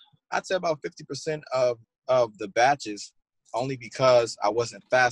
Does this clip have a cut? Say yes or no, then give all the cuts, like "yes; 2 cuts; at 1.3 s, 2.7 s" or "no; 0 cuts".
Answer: yes; 1 cut; at 1.9 s